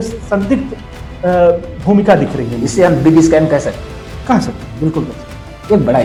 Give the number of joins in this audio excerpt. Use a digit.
0